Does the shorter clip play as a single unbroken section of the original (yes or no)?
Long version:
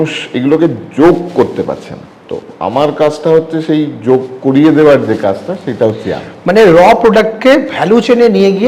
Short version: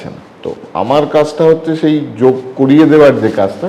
yes